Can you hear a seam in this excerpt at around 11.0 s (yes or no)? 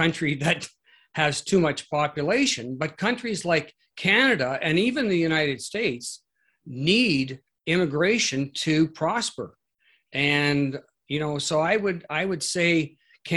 no